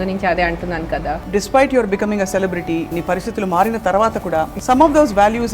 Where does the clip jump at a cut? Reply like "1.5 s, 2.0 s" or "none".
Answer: 1.3 s, 2.9 s, 4.6 s